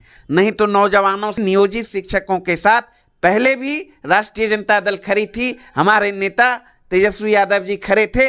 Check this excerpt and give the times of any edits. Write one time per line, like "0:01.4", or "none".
0:01.4

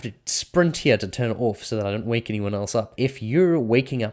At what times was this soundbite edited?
0:02.9

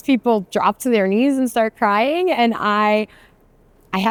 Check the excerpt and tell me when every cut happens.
none

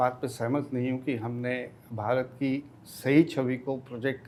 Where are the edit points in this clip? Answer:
none

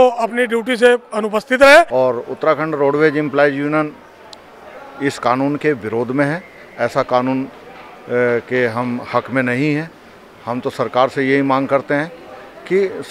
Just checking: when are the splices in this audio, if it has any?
0:01.9

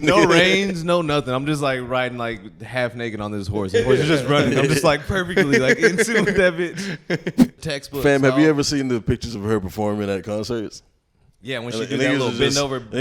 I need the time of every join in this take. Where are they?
0:07.6

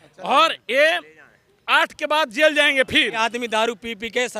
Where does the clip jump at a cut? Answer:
0:03.2

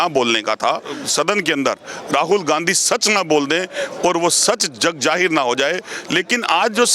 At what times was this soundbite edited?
0:01.0
0:05.9

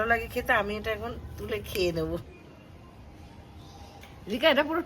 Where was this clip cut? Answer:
0:02.2
0:04.0

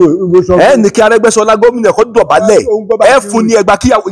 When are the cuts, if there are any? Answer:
none

